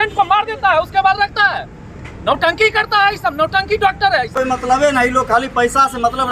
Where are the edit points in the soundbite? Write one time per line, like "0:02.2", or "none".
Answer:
0:04.3